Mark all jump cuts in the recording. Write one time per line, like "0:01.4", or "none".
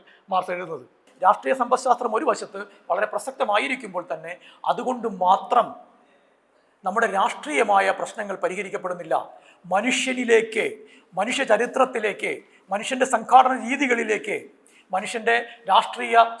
0:01.0